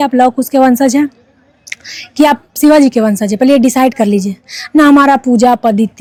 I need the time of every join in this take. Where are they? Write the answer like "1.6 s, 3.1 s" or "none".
none